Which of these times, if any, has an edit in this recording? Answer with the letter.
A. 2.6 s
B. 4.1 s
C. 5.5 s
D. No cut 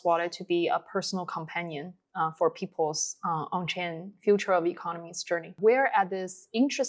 C